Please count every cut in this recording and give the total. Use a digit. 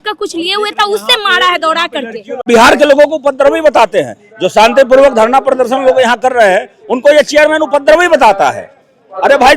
1